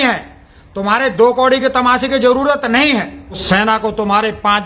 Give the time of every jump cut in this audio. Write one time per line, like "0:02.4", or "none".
0:03.4